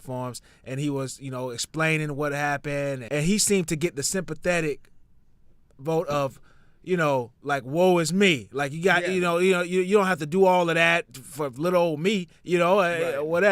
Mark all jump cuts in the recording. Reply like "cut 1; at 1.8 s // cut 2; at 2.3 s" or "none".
cut 1; at 3.0 s